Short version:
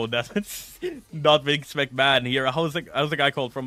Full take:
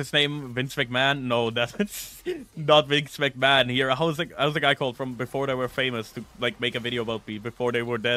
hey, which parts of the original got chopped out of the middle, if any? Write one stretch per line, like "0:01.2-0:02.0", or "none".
none